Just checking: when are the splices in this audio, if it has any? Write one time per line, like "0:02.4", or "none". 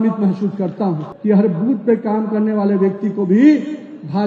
0:01.1